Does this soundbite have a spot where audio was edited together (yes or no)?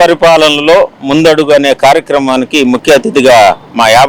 no